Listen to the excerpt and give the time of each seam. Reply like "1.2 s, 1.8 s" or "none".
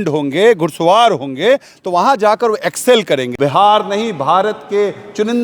3.3 s